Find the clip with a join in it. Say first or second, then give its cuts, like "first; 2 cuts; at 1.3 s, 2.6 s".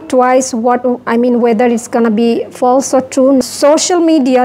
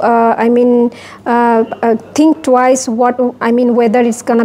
first; 1 cut; at 3.4 s